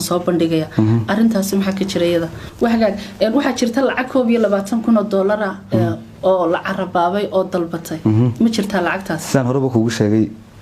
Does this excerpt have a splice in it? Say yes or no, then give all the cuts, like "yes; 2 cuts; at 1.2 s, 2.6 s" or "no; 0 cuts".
yes; 1 cut; at 2.4 s